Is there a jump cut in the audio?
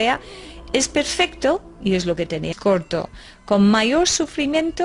no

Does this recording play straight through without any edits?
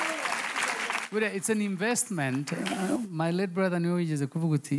yes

